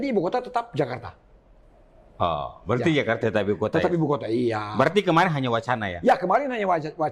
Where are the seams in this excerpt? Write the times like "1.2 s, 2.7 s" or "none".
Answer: none